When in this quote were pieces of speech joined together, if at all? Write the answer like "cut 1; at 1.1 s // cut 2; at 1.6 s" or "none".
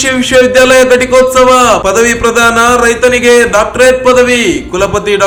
none

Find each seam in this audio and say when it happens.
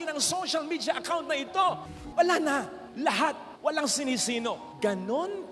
cut 1; at 1.9 s

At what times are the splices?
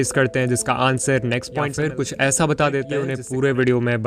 cut 1; at 1.7 s // cut 2; at 3.2 s

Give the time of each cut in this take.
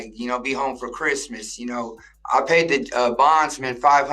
cut 1; at 2.1 s

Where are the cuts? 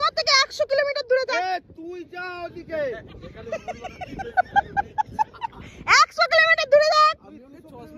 none

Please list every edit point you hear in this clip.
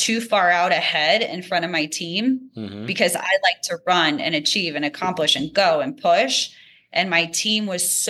none

